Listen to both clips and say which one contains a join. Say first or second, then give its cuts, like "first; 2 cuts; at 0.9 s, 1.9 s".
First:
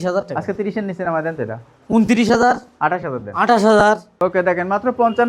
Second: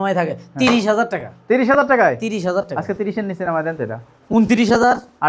first; 1 cut; at 4.1 s